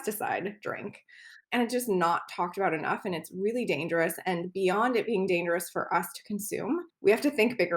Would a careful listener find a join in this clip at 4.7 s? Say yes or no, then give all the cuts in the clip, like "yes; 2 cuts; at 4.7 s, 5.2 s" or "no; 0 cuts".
no; 2 cuts; at 1.4 s, 6.9 s